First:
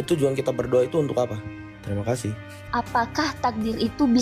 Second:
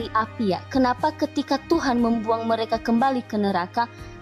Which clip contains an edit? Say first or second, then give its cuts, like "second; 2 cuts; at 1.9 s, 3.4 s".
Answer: first; 1 cut; at 2.6 s